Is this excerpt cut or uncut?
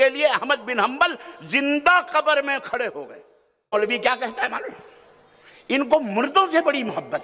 cut